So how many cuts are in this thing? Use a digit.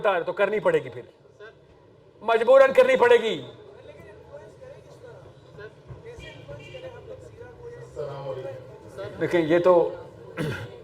0